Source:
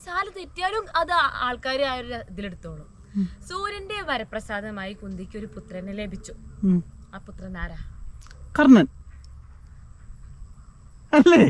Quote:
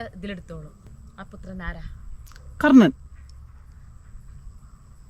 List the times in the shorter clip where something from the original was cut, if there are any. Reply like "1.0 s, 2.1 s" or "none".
0.9 s